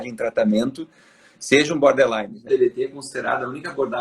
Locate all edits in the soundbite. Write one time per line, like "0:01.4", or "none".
0:02.5